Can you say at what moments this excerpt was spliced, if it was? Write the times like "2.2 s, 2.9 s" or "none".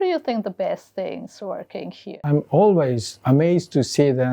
2.2 s

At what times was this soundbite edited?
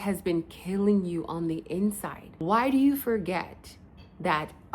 2.2 s

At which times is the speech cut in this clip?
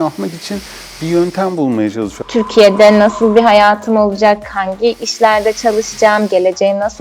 2.1 s

